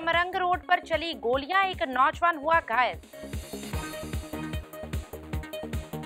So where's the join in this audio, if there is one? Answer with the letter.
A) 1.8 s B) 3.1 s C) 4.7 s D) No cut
B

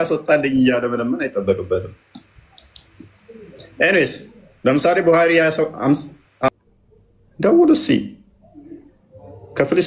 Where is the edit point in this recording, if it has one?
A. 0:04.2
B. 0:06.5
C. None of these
B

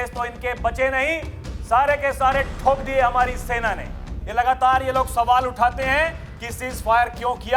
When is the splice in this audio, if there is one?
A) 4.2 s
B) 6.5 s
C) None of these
A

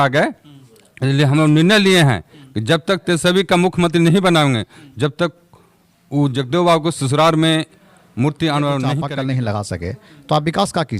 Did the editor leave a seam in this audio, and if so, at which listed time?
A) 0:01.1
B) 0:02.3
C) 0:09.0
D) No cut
C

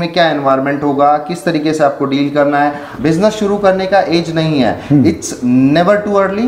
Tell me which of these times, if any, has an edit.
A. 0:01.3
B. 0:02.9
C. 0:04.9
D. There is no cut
B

